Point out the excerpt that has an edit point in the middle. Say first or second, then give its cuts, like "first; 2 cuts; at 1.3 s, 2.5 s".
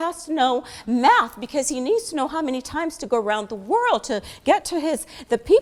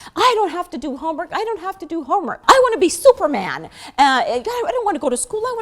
second; 1 cut; at 2.3 s